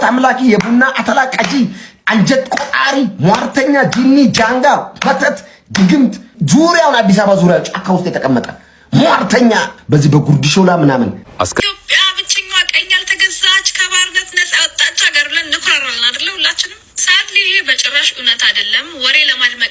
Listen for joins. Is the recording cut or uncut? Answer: cut